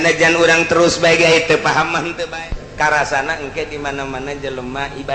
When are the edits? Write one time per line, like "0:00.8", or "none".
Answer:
0:02.4